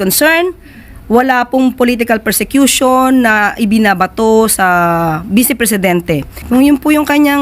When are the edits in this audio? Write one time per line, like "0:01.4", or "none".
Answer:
0:06.4